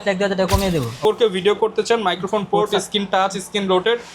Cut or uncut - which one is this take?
cut